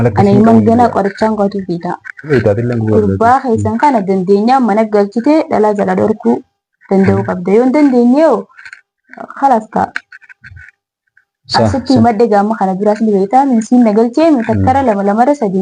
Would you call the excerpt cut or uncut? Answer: cut